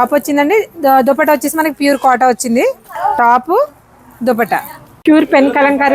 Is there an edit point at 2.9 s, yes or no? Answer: yes